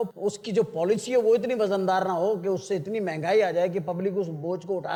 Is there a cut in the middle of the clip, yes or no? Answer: no